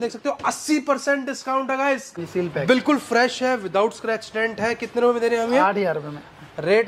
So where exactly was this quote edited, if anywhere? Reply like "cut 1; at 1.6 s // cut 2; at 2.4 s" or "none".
cut 1; at 2.2 s